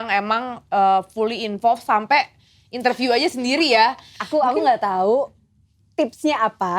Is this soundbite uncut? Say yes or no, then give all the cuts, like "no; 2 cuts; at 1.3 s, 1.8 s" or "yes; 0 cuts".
no; 1 cut; at 4.1 s